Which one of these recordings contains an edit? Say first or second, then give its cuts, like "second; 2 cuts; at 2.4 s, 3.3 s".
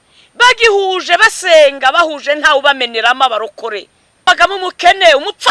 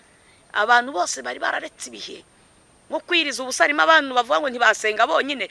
first; 1 cut; at 4.3 s